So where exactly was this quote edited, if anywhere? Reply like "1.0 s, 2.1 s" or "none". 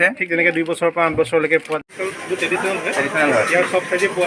1.9 s